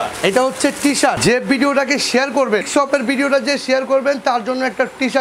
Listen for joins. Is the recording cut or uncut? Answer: cut